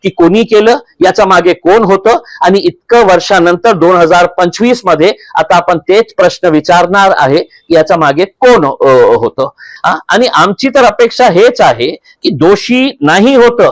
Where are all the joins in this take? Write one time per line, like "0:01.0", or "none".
0:09.7

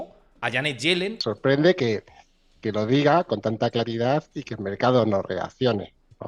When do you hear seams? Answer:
0:01.2

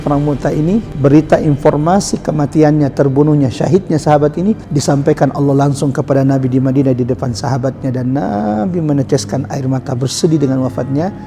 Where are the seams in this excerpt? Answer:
0:00.9
0:04.7

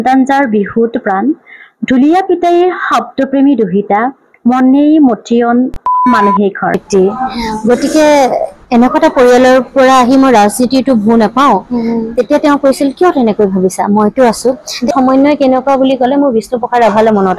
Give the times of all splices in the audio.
0:06.8
0:14.9

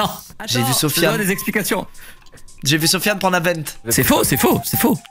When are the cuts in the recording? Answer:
0:03.8

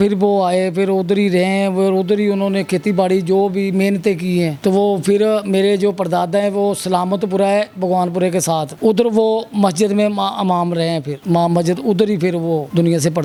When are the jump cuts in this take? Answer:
none

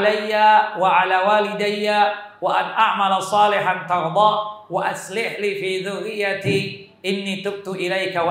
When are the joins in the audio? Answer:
none

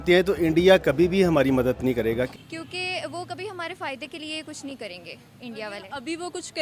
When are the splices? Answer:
0:02.3

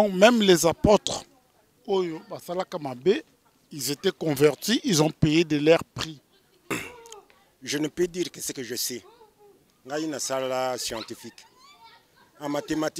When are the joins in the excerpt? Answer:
0:06.8

